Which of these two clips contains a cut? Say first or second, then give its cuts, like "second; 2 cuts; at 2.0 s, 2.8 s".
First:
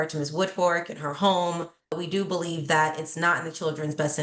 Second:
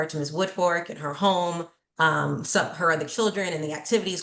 first; 1 cut; at 1.9 s